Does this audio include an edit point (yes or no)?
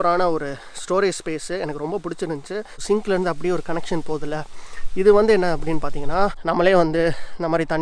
yes